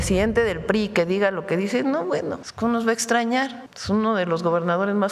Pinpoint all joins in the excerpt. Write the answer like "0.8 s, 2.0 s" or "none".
2.5 s, 3.7 s